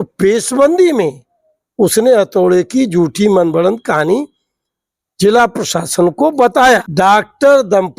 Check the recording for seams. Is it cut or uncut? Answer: cut